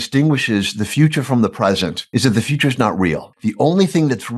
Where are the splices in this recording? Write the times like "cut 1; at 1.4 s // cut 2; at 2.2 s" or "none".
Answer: cut 1; at 2.0 s // cut 2; at 3.3 s